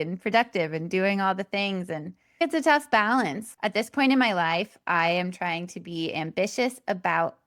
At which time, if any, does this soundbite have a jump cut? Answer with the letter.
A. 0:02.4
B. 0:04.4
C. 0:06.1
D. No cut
A